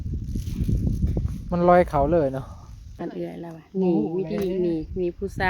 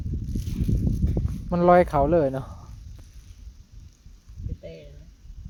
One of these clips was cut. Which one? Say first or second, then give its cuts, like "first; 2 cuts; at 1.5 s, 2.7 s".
first; 1 cut; at 3.0 s